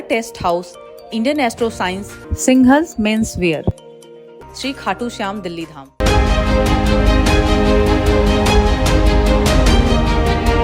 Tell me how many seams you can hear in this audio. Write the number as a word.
one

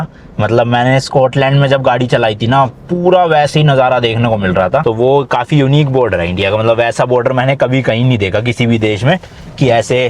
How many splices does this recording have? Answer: one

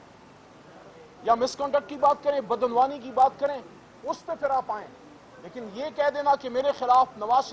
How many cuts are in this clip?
zero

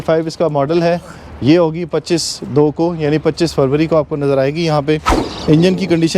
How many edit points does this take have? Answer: one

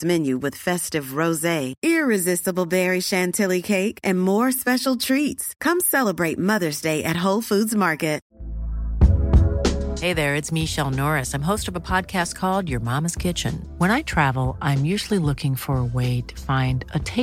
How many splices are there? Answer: one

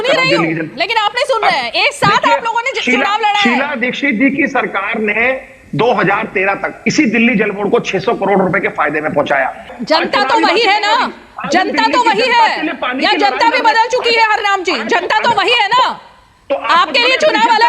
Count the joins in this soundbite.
one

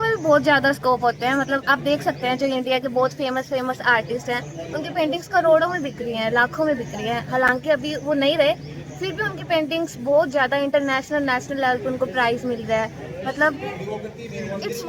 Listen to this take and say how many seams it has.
zero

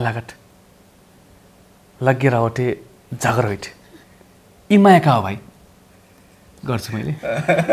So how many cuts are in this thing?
zero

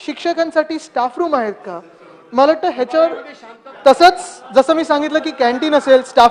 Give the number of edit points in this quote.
zero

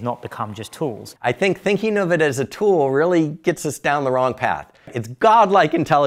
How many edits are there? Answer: two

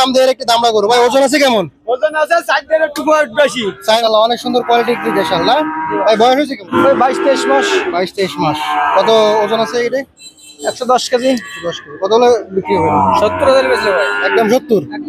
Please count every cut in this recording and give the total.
two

